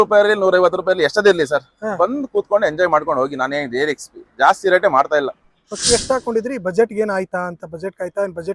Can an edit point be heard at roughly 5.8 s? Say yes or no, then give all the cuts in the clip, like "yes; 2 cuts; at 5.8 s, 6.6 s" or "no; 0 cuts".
yes; 1 cut; at 5.8 s